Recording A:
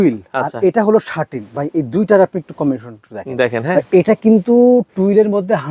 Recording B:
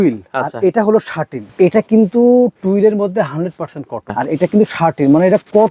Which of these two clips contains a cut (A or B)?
B